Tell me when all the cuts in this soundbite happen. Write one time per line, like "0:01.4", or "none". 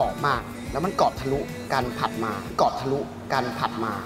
none